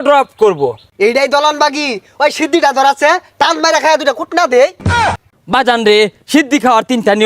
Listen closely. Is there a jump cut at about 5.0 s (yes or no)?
yes